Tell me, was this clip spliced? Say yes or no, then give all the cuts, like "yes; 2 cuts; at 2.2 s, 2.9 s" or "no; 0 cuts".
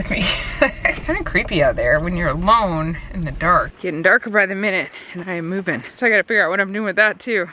yes; 3 cuts; at 1.0 s, 3.7 s, 5.9 s